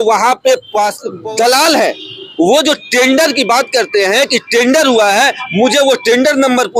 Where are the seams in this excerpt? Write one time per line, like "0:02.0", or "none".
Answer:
0:01.1